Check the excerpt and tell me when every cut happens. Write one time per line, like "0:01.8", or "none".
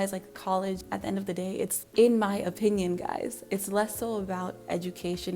none